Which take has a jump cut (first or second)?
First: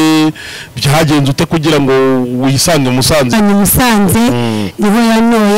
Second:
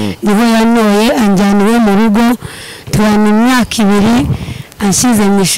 first